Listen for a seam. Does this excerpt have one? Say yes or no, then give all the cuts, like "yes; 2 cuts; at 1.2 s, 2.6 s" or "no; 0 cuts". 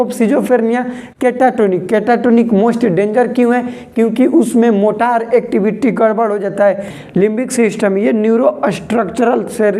yes; 1 cut; at 6.9 s